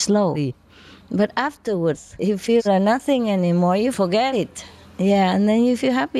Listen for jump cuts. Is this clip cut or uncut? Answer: uncut